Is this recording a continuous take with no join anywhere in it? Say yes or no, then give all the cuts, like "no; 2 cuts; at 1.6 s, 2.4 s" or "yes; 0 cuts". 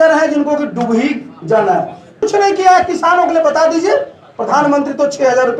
no; 1 cut; at 2.2 s